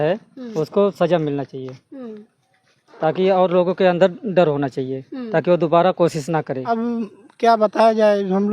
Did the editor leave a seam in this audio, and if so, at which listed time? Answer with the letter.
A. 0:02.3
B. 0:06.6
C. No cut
B